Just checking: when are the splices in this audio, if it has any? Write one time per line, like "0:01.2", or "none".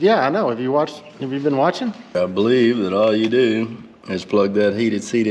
0:02.1